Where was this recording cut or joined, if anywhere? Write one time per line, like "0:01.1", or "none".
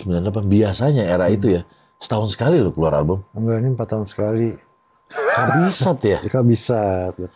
none